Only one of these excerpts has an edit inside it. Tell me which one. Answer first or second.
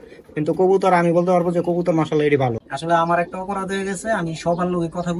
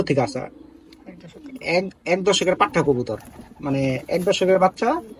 first